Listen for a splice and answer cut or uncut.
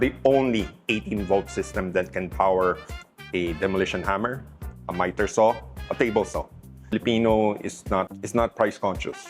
cut